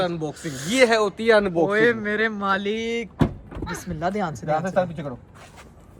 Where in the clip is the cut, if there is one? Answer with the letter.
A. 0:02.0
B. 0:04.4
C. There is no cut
C